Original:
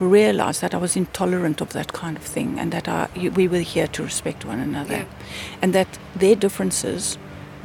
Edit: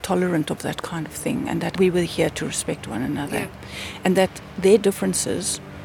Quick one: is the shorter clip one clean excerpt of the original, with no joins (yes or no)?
no